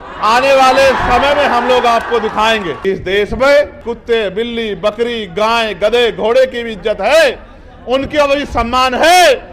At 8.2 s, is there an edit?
no; 2 cuts; at 2.7 s, 3.9 s

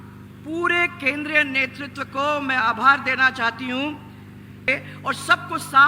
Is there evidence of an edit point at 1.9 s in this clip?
no; 1 cut; at 4.7 s

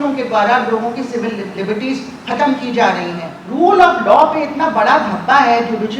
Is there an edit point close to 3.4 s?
yes; 1 cut; at 3.4 s

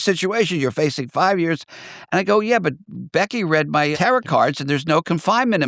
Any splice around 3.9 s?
yes; 1 cut; at 3.9 s

